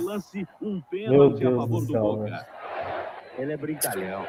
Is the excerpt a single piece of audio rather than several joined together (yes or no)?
yes